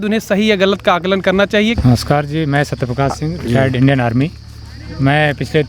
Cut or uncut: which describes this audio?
cut